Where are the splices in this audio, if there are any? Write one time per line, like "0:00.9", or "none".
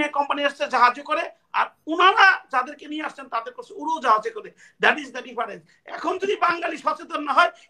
none